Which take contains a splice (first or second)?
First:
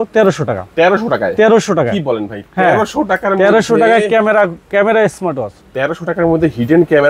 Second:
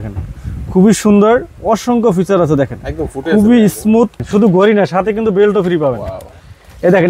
second